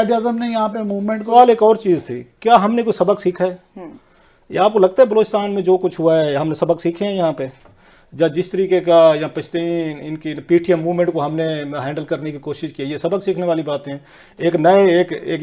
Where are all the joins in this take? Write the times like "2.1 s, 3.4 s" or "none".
1.3 s